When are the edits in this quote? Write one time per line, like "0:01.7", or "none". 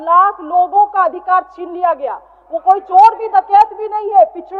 none